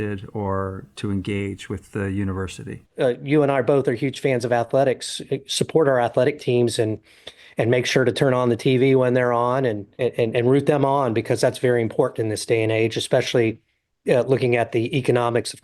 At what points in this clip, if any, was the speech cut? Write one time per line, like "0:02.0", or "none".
0:02.8